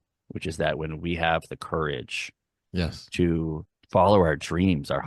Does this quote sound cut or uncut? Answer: cut